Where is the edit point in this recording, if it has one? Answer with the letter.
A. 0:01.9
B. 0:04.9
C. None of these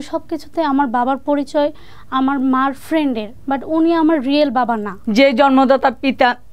B